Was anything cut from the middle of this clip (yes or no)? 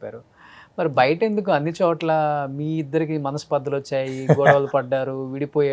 no